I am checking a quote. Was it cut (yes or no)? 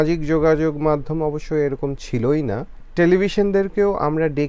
yes